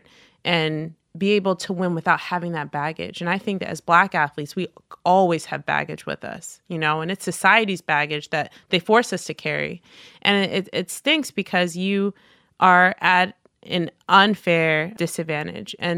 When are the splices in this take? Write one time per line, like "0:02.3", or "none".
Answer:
0:01.0
0:14.9